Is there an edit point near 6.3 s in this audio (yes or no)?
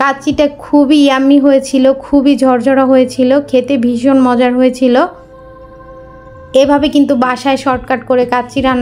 yes